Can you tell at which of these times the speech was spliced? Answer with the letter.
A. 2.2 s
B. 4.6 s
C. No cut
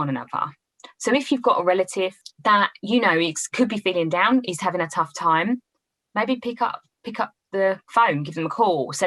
A